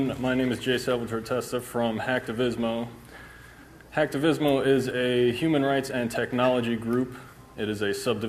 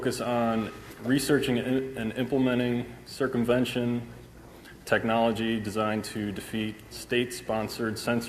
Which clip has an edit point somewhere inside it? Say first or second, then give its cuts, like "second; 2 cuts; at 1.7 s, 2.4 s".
second; 1 cut; at 5.3 s